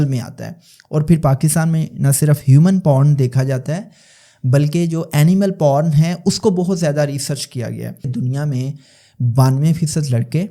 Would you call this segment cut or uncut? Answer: cut